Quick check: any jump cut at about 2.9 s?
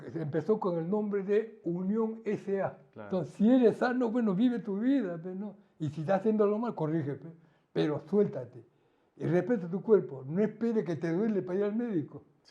yes; 1 cut; at 2.9 s

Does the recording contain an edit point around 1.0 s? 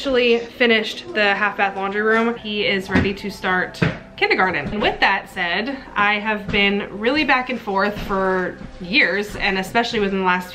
no; 2 cuts; at 2.4 s, 4.7 s

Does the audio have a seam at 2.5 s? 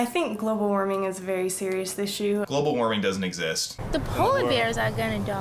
yes; 2 cuts; at 2.5 s, 3.7 s

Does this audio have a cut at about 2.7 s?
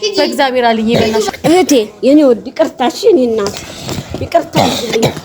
no; 1 cut; at 1.3 s

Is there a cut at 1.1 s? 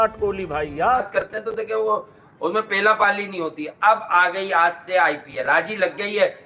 yes; 1 cut; at 1.1 s

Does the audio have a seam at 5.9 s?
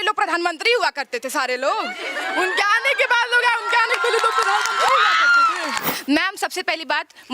yes; 1 cut; at 5.9 s

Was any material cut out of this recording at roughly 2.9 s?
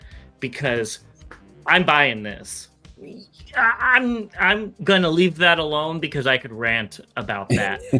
yes; 1 cut; at 2.9 s

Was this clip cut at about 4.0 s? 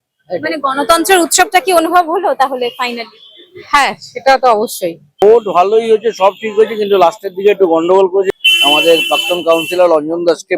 no; 2 cuts; at 5.2 s, 8.3 s

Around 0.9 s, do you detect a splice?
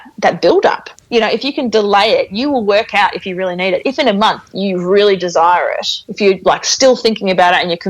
yes; 1 cut; at 0.9 s

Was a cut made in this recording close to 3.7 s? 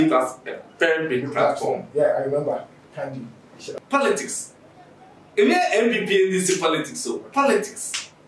yes; 1 cut; at 3.7 s

